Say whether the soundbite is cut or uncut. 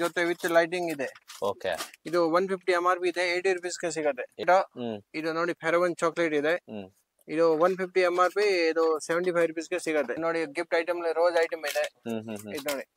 cut